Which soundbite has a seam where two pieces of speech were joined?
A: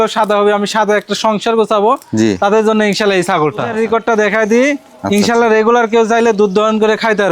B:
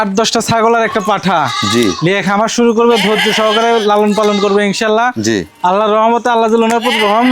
A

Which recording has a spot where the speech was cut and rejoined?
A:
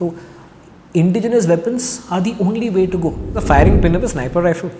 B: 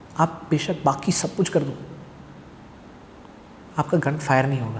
A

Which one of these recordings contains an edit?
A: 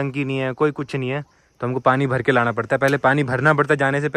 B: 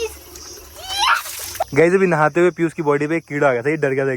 B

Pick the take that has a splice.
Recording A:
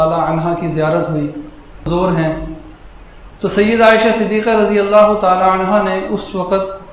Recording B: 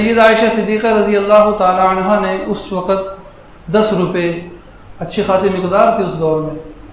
A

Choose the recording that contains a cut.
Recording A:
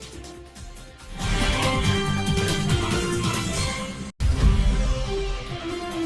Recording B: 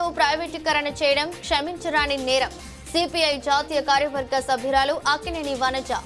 A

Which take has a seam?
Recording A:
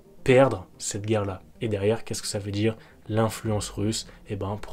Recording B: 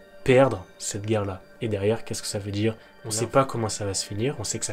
B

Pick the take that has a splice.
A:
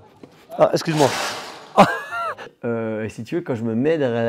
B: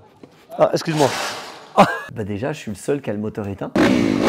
B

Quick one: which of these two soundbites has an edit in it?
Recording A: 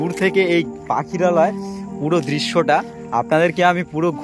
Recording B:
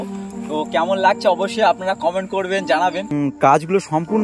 B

